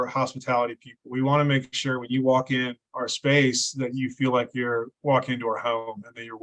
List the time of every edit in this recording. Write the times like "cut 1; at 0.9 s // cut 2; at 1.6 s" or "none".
none